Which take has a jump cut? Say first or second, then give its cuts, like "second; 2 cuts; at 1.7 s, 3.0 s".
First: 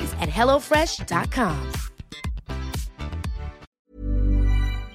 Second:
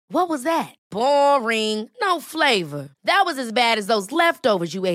first; 1 cut; at 3.6 s